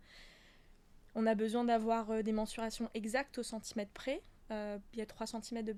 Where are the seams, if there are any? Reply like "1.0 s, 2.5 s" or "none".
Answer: none